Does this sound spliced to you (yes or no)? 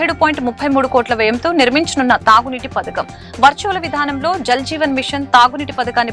no